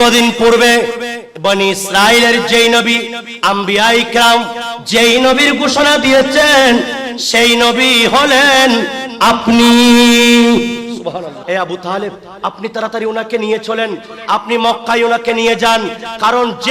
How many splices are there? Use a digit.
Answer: 1